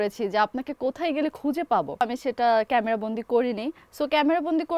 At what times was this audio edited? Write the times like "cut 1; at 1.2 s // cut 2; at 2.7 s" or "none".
cut 1; at 2.0 s